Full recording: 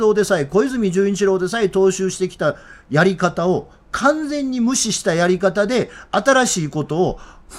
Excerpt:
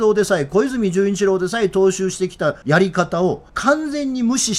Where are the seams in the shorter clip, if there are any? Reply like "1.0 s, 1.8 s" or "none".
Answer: 2.6 s, 3.5 s

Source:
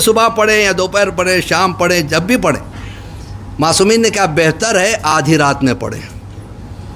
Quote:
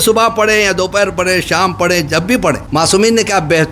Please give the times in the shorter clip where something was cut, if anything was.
2.6 s

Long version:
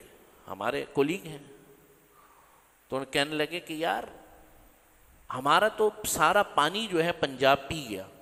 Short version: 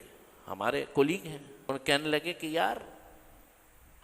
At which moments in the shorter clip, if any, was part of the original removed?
1.7 s

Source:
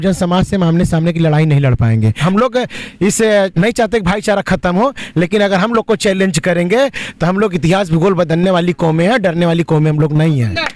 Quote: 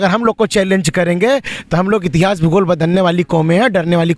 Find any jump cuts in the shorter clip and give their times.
none

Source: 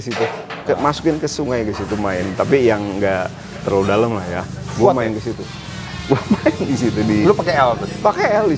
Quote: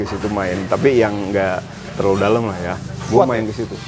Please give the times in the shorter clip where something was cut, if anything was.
none

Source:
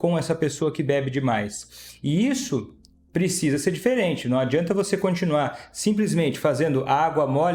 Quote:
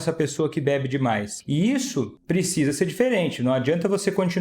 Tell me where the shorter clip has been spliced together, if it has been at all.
1.3 s, 2.2 s

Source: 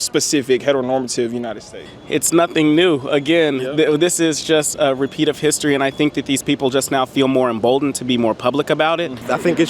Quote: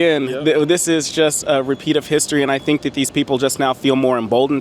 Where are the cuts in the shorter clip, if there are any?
none

